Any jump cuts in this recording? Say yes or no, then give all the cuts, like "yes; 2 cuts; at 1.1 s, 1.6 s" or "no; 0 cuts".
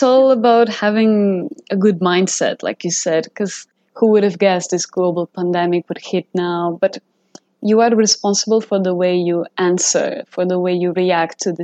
yes; 1 cut; at 3.8 s